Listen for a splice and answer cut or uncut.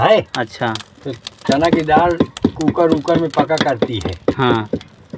uncut